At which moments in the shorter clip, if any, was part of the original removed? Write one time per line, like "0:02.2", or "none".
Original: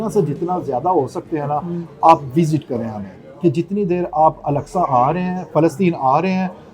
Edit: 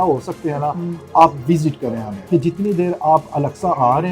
0:02.1